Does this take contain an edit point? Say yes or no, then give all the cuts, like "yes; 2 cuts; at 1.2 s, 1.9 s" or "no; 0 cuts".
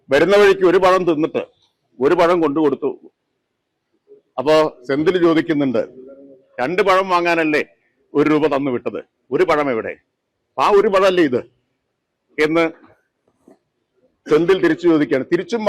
no; 0 cuts